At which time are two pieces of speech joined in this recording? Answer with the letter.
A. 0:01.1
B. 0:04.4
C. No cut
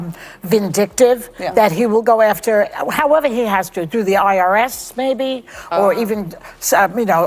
B